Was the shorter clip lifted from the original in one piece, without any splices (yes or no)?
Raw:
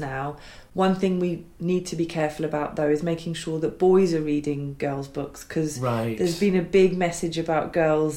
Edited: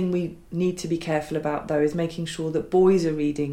yes